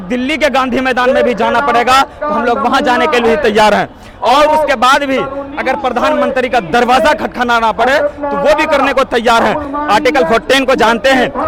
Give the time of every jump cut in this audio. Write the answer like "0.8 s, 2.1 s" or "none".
none